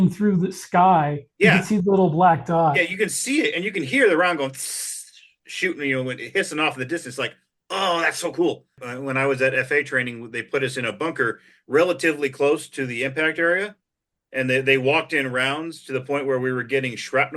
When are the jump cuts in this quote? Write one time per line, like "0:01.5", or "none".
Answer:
0:08.9